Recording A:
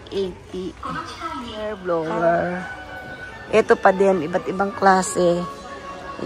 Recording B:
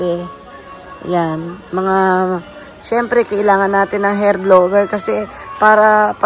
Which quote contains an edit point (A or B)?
A